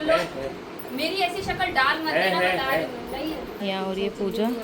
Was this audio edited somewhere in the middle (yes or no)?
yes